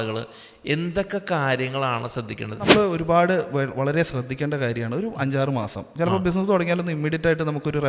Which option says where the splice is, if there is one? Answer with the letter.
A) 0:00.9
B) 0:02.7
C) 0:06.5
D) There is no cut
B